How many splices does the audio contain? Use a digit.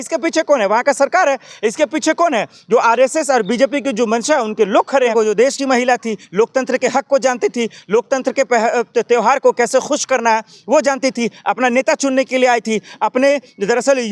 1